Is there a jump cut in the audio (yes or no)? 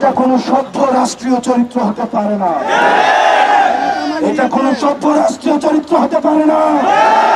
no